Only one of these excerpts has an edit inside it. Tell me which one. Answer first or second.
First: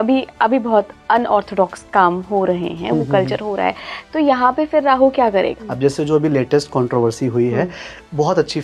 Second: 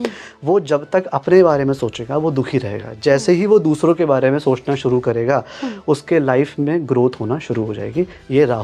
first